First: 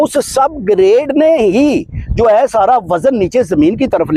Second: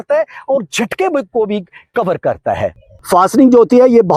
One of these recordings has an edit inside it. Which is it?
second; 1 cut; at 2.9 s

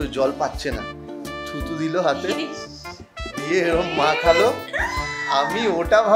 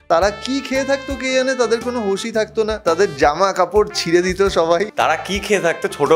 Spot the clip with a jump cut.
second; 2 cuts; at 2.8 s, 4.9 s

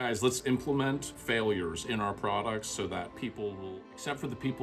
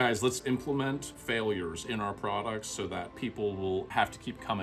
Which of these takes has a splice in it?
first; 1 cut; at 3.6 s

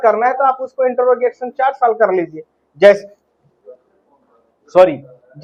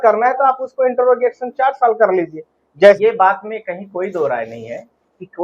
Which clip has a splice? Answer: second; 1 cut; at 3.0 s

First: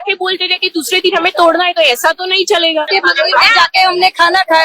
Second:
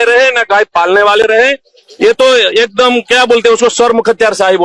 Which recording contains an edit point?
first; 1 cut; at 2.9 s

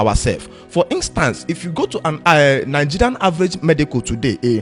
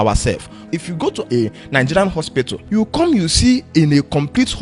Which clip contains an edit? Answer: second; 2 cuts; at 0.7 s, 2.6 s

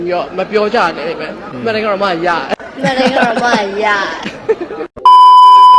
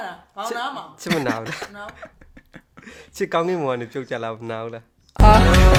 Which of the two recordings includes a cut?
first; 1 cut; at 4.8 s

